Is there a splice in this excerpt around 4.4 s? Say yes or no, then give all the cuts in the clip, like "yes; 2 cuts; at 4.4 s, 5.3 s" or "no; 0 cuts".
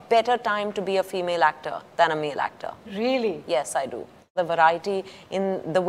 yes; 1 cut; at 4.4 s